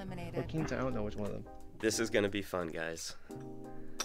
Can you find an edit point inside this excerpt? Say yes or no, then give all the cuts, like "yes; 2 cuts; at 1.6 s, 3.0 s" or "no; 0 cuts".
yes; 1 cut; at 1.6 s